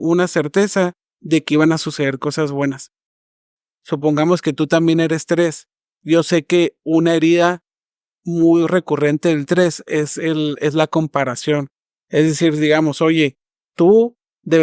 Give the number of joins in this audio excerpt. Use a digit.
1